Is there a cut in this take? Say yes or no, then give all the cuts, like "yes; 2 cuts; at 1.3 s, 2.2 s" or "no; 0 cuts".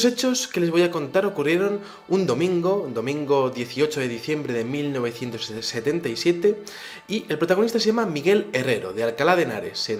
no; 0 cuts